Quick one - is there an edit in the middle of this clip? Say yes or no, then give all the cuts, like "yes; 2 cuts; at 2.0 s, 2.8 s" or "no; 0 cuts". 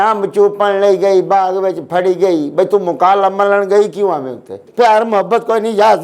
yes; 1 cut; at 4.5 s